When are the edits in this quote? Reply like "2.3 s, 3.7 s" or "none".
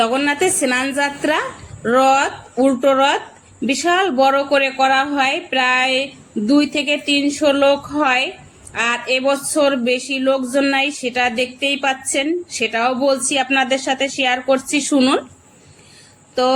none